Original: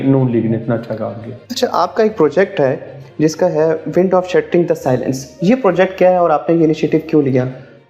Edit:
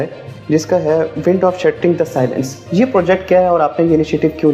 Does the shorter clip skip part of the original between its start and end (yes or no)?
no